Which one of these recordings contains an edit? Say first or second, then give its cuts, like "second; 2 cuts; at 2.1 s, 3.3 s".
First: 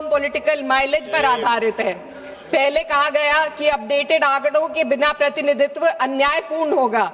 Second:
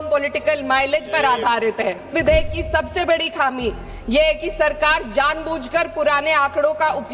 second; 1 cut; at 2.1 s